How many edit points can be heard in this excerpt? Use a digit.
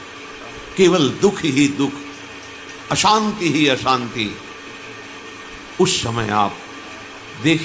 0